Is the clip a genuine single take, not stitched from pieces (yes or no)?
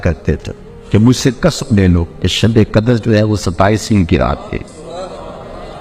yes